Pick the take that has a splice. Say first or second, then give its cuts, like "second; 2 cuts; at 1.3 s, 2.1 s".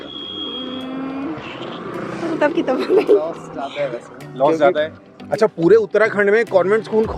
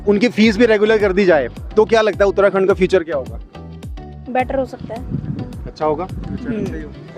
first; 1 cut; at 5.1 s